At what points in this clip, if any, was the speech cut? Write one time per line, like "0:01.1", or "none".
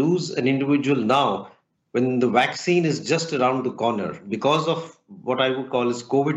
0:04.2